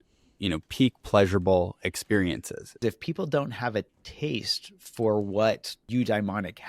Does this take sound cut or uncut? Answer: cut